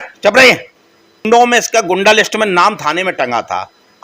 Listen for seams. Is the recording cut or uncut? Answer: cut